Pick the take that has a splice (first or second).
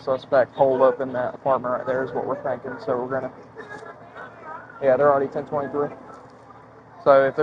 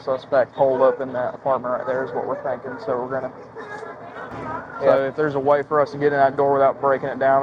second